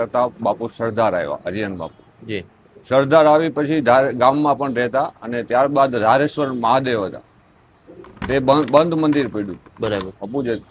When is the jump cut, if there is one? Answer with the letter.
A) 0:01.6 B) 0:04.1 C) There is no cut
C